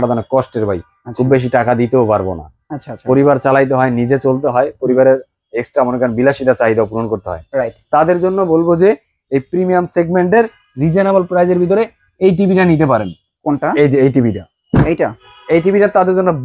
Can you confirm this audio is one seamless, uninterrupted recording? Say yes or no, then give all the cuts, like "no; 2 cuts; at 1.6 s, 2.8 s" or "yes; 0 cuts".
yes; 0 cuts